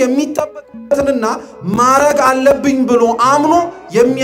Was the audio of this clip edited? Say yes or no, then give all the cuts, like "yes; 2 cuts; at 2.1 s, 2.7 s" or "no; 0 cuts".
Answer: no; 0 cuts